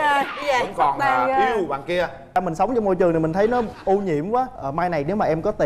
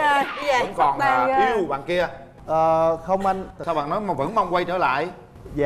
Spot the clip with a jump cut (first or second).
first